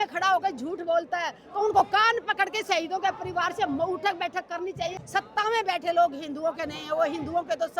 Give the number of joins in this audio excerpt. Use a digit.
1